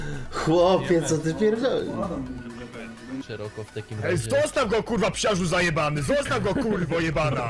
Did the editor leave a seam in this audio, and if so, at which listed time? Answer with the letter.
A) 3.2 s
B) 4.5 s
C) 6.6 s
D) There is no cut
A